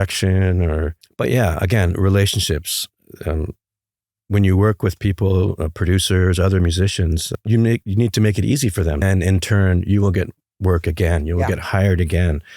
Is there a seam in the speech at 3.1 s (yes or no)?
no